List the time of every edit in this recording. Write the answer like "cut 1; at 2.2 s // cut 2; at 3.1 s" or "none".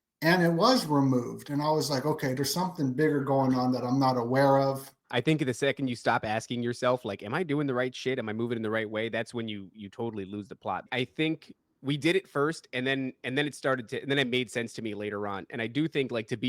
cut 1; at 5.0 s // cut 2; at 10.8 s